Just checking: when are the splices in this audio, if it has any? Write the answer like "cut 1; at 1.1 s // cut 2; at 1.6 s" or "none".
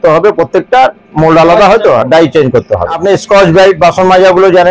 cut 1; at 3.0 s